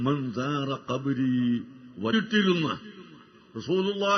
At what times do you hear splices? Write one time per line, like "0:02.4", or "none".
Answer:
none